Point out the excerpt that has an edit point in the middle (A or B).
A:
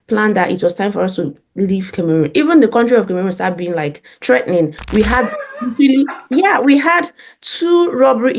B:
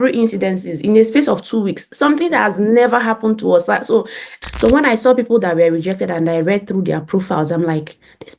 B